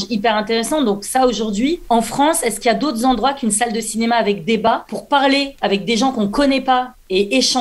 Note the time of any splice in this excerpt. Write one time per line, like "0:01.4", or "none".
0:01.8
0:04.7